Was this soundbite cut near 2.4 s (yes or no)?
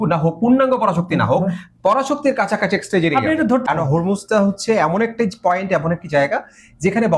no